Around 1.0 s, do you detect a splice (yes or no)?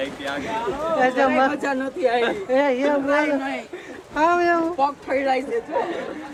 no